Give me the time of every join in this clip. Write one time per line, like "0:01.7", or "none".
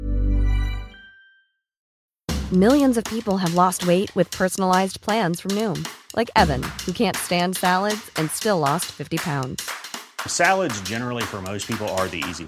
0:01.8